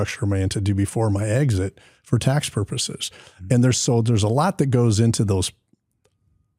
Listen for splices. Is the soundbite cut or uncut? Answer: uncut